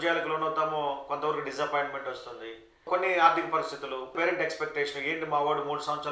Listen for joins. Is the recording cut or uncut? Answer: cut